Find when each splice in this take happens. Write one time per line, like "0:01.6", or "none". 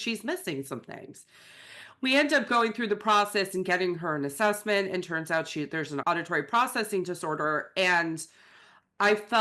0:06.0